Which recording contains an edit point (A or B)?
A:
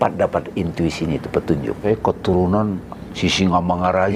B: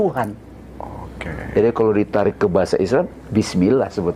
A